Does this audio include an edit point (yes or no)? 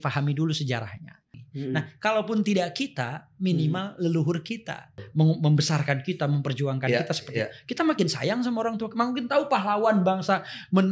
no